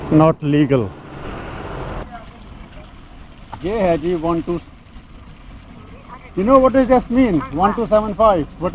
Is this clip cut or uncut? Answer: uncut